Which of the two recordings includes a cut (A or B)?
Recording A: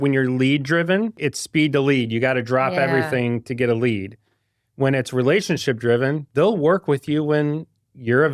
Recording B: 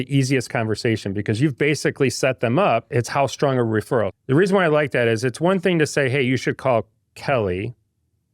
B